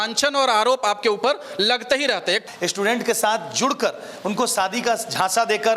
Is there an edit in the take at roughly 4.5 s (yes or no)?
no